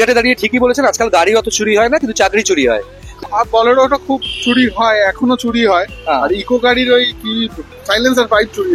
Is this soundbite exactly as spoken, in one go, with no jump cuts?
no; 1 cut; at 3.1 s

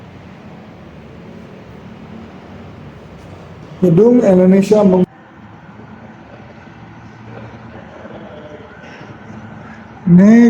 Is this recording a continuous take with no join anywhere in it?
no; 1 cut; at 5.0 s

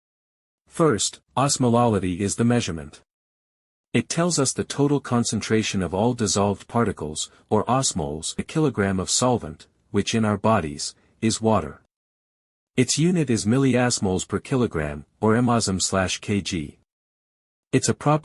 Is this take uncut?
yes; 0 cuts

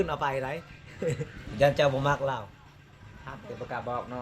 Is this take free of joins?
no; 1 cut; at 1.4 s

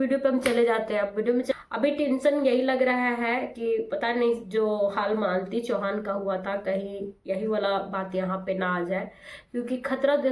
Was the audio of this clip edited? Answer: yes; 1 cut; at 1.5 s

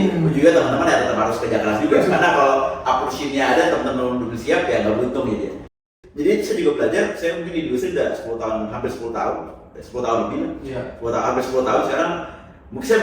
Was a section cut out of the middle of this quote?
yes; 1 cut; at 5.8 s

